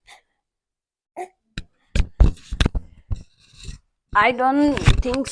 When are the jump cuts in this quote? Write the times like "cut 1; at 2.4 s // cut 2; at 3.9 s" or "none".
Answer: none